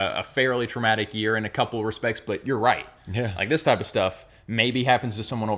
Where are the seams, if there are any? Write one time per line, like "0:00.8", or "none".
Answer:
none